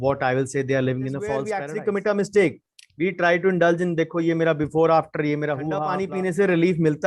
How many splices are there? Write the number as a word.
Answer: two